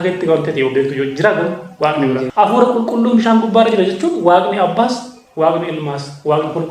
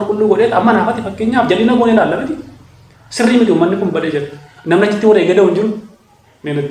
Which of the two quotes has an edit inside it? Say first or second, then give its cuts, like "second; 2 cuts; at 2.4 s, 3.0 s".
first; 1 cut; at 2.3 s